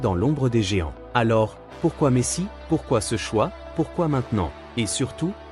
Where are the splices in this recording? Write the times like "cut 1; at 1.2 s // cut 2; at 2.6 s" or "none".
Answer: cut 1; at 1.0 s // cut 2; at 2.5 s